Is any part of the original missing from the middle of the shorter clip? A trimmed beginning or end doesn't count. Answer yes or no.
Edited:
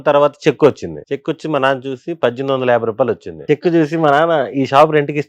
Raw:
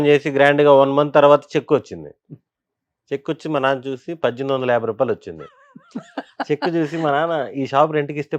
yes